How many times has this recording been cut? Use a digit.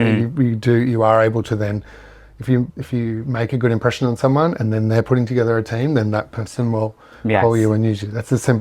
0